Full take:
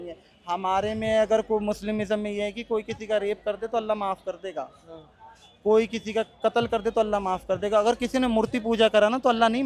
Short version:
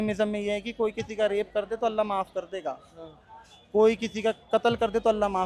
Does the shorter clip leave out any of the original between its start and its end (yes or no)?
no